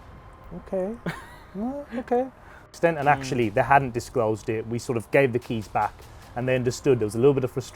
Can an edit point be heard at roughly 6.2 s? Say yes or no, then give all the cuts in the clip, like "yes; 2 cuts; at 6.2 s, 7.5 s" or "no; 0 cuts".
no; 1 cut; at 2.6 s